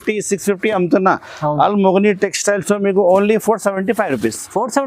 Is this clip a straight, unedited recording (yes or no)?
yes